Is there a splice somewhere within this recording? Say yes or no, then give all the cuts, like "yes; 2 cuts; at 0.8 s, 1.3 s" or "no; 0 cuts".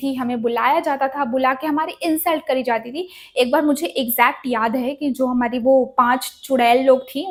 no; 0 cuts